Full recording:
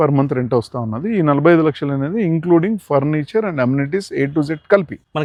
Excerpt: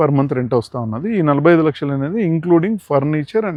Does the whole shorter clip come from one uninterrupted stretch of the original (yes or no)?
yes